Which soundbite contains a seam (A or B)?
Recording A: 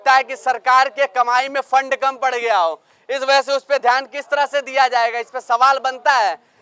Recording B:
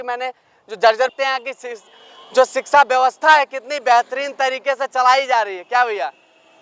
B